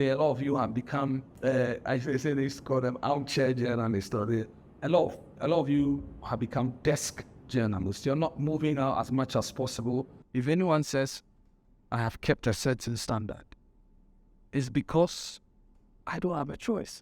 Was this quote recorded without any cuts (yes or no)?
no